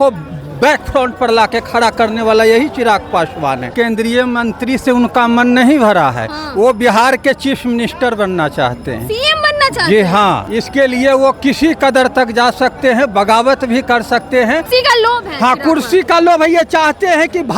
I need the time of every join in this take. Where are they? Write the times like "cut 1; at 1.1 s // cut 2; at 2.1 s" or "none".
cut 1; at 3.7 s // cut 2; at 10.5 s // cut 3; at 14.7 s